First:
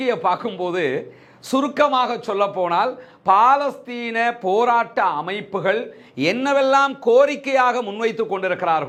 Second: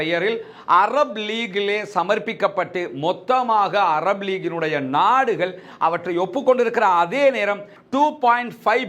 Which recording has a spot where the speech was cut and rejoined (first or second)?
second